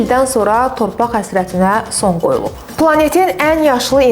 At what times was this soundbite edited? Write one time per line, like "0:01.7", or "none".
0:02.6